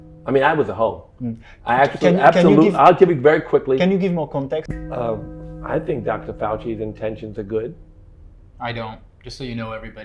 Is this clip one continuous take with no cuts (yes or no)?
no